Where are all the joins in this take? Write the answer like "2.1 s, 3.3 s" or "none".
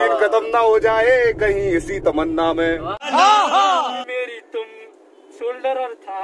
4.0 s